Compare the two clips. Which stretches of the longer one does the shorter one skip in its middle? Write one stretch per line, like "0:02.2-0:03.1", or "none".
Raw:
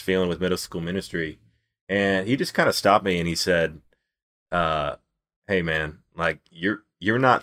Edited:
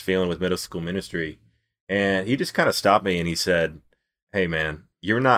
0:04.4-0:06.4